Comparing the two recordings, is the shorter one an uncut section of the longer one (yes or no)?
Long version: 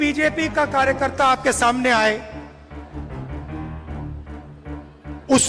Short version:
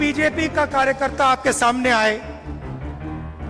no